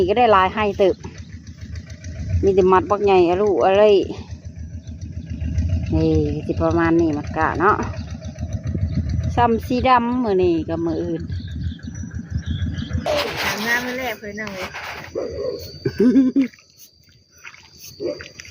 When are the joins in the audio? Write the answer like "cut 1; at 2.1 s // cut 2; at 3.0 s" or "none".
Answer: cut 1; at 13.1 s

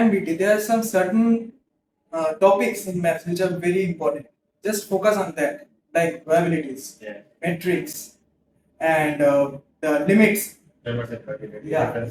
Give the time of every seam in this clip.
none

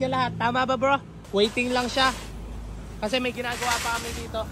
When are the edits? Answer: cut 1; at 1.2 s

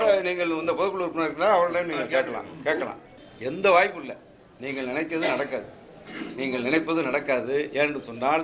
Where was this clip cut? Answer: cut 1; at 3.1 s

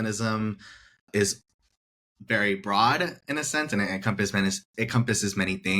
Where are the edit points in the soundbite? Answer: cut 1; at 1.1 s

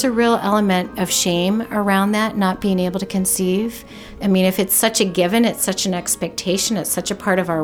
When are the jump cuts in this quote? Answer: cut 1; at 0.9 s

